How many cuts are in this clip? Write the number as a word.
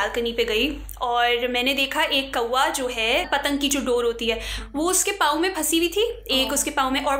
zero